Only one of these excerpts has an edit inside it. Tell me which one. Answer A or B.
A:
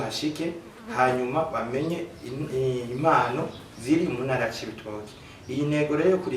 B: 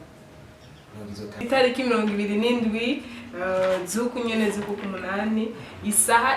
B